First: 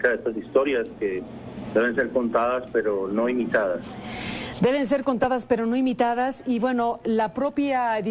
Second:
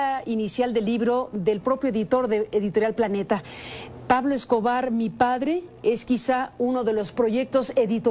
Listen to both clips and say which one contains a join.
first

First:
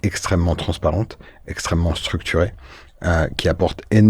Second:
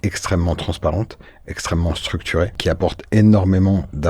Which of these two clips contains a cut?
second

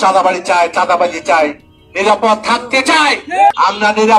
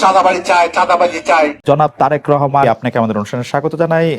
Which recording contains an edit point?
second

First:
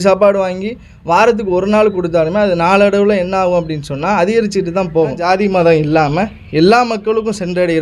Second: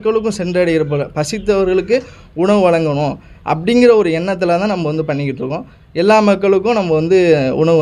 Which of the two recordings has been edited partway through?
first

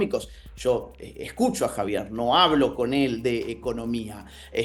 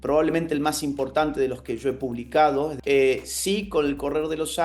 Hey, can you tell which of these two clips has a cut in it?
second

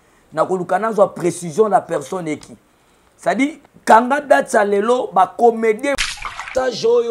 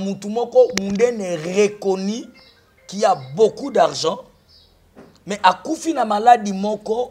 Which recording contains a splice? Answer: first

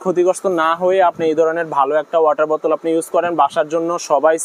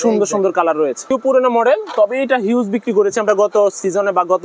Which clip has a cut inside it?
second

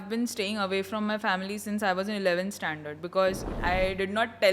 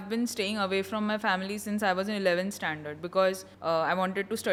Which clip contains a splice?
first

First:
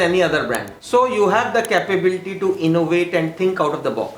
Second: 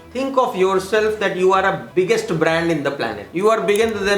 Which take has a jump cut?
second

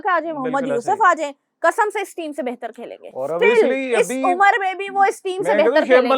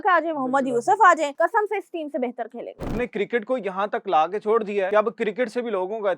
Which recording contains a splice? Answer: second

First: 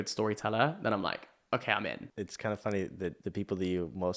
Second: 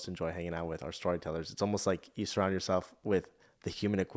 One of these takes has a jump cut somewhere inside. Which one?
first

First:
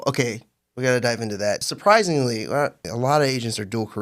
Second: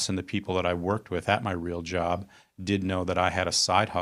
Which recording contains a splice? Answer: first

